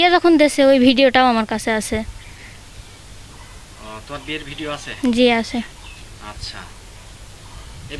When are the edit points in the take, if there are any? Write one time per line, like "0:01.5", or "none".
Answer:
none

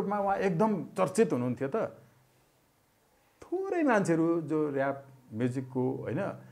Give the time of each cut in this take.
none

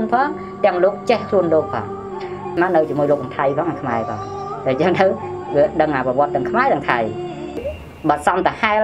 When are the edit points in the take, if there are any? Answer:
0:02.5
0:07.6

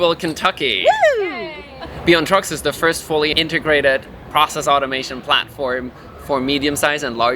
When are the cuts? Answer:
none

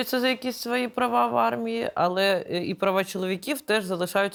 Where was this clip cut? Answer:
none

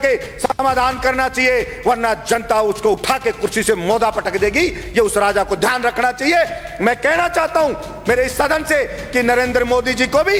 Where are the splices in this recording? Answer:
none

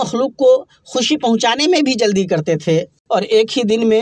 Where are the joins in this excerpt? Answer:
0:03.0

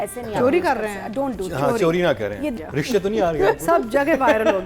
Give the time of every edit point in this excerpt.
0:02.5

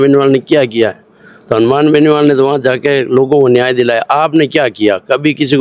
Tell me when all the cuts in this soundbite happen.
none

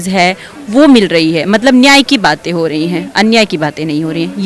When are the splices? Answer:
none

